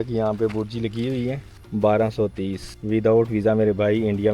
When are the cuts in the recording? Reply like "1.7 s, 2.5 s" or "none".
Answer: 1.5 s, 2.7 s